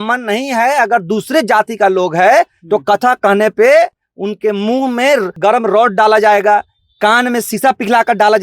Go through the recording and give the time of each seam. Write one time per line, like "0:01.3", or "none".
0:05.4